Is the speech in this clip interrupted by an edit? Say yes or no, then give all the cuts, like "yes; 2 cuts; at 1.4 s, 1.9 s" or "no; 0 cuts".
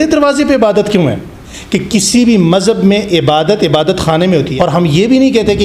yes; 2 cuts; at 1.5 s, 4.5 s